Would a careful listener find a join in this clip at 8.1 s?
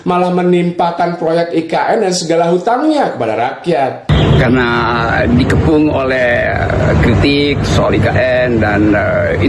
no; 1 cut; at 4.1 s

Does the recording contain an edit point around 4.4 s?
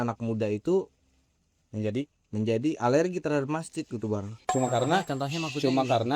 yes; 1 cut; at 4.4 s

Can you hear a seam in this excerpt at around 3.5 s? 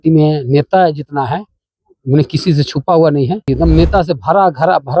yes; 1 cut; at 3.5 s

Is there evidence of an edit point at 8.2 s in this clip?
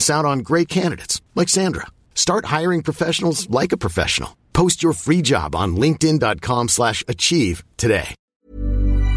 yes; 1 cut; at 8.2 s

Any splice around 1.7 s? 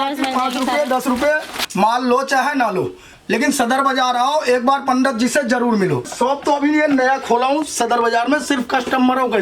yes; 2 cuts; at 1.7 s, 6.1 s

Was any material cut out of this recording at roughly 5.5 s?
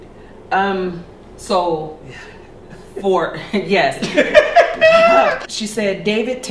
yes; 1 cut; at 5.5 s

